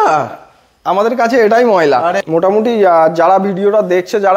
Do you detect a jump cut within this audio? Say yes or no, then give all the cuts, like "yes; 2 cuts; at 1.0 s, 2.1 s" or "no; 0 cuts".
yes; 1 cut; at 2.2 s